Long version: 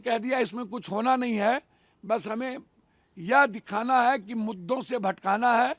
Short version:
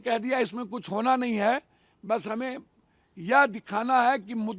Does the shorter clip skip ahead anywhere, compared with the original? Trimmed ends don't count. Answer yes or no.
no